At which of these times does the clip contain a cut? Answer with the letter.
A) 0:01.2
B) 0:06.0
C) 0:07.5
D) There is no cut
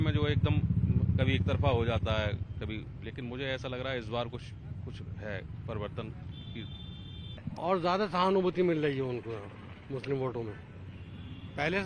C